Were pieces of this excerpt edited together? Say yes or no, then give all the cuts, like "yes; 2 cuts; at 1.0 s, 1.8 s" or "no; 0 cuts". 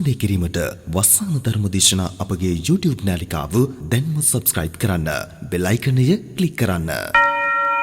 yes; 1 cut; at 6.9 s